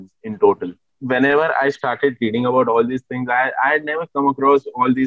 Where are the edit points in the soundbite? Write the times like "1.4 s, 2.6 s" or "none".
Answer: 0.9 s

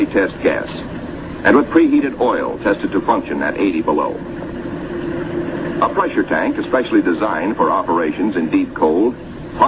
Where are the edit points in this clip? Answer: 1.9 s

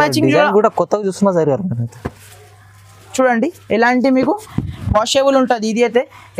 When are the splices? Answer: 4.6 s

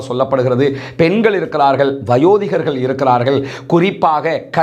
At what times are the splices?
none

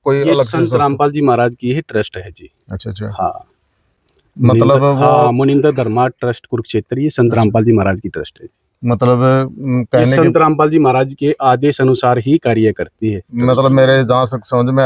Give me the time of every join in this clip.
none

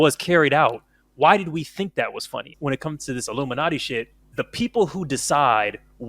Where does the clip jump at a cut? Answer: 2.5 s, 4.2 s

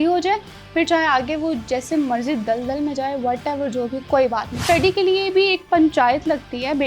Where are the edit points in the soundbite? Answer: 4.6 s

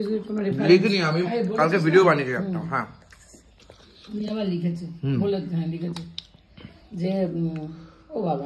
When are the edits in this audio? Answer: none

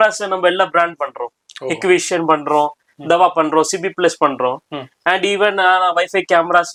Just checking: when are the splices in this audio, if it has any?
none

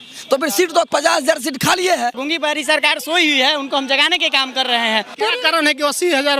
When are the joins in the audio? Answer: 2.2 s, 5.2 s

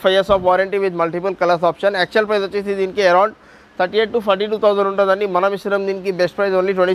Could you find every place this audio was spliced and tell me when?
none

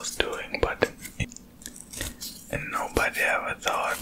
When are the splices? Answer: 1.1 s

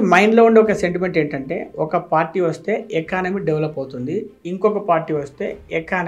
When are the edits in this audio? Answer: none

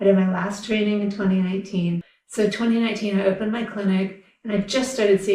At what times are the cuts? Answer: 2.1 s

